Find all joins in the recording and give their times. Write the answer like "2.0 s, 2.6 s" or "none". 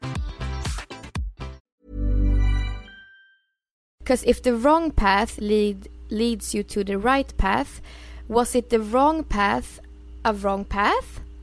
1.6 s, 4.0 s

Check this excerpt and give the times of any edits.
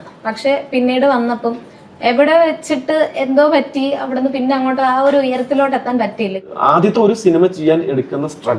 6.5 s

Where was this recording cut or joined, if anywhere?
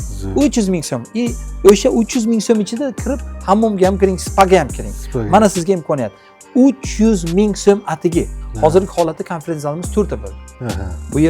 8.4 s

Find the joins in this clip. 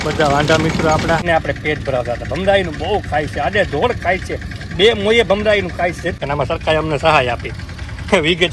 1.2 s, 6.2 s

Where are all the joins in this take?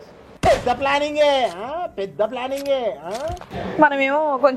3.5 s

